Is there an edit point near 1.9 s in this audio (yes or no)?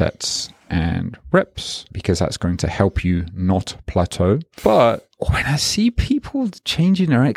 yes